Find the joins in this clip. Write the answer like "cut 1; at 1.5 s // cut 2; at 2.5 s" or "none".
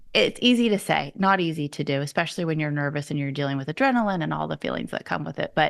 none